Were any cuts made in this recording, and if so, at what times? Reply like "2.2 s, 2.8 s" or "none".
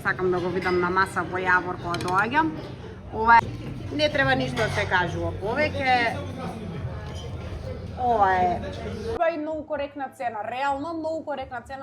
3.4 s, 9.1 s